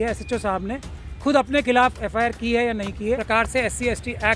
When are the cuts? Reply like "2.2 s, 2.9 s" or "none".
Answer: 3.2 s